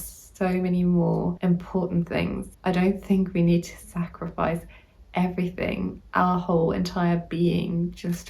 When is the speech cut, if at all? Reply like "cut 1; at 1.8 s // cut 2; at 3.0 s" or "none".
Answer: cut 1; at 1.4 s // cut 2; at 2.5 s